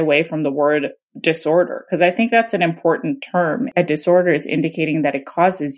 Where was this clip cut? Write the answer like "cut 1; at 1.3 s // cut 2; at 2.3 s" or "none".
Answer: cut 1; at 3.7 s